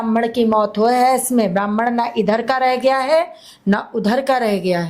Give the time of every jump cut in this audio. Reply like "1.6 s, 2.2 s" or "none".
none